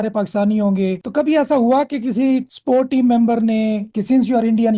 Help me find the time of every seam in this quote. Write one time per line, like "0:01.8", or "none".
0:01.0
0:03.9